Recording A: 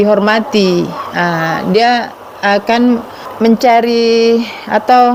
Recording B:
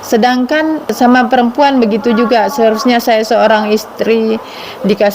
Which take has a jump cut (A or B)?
B